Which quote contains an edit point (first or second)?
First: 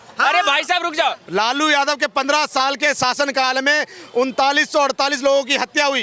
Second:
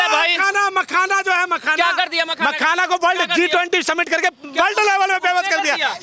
first